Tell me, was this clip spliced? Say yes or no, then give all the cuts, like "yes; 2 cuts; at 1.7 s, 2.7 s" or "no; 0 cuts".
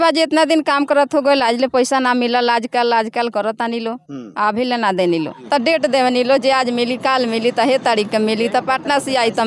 yes; 1 cut; at 5.4 s